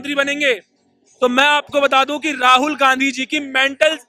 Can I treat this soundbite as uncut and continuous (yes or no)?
yes